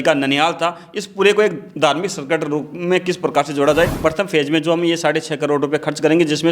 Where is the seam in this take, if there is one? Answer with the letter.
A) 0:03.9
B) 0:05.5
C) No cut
A